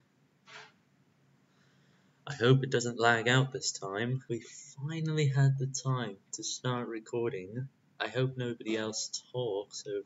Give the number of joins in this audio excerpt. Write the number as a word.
one